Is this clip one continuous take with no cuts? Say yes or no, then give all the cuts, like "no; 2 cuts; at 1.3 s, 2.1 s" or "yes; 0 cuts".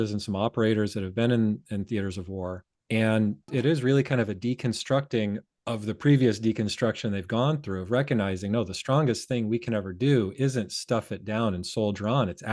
no; 3 cuts; at 2.7 s, 3.5 s, 5.5 s